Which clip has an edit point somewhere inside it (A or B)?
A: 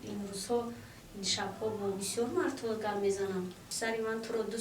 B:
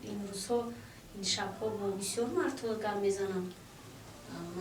A